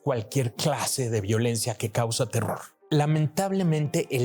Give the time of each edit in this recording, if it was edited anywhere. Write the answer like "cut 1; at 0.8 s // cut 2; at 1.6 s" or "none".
cut 1; at 2.7 s